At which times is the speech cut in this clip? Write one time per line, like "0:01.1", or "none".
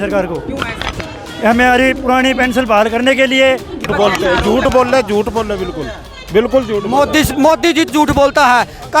0:03.9
0:07.9